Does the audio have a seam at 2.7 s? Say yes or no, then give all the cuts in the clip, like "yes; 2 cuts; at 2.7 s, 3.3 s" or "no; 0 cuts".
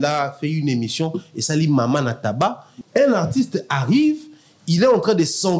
yes; 1 cut; at 2.7 s